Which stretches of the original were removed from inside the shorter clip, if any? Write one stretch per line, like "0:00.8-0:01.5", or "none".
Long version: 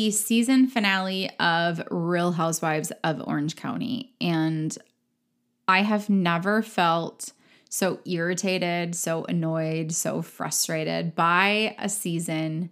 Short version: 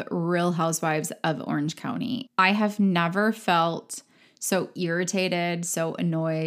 0:04.1-0:05.6